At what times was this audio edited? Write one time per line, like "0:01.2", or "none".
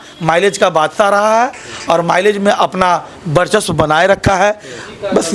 none